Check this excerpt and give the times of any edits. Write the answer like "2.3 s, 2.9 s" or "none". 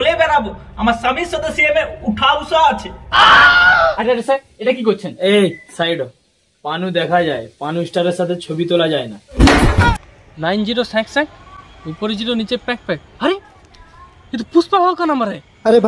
3.7 s, 10.0 s